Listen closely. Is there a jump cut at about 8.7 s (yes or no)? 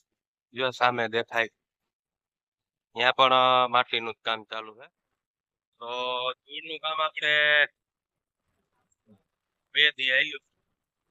no